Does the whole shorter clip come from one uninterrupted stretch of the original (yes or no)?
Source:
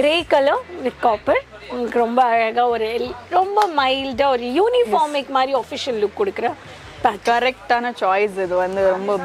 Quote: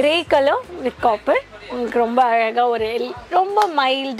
yes